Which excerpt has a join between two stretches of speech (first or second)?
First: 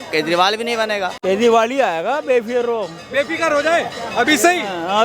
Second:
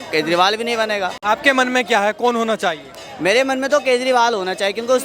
first